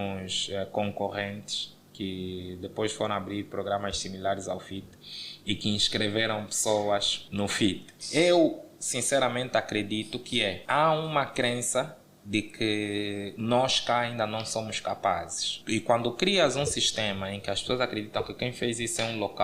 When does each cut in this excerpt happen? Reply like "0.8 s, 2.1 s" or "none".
7.9 s